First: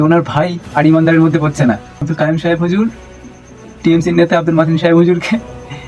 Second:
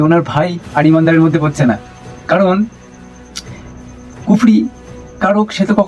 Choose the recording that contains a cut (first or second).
first